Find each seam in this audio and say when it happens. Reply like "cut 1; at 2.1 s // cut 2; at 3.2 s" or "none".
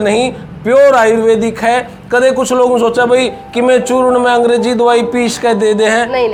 none